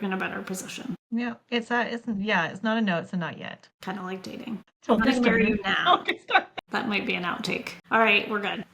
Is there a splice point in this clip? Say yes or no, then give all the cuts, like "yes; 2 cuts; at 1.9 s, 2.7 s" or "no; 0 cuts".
yes; 1 cut; at 7.8 s